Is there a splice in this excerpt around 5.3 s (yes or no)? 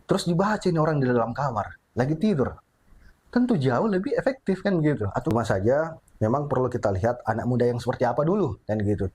yes